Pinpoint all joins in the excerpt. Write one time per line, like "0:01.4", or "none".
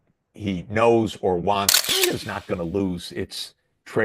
0:01.8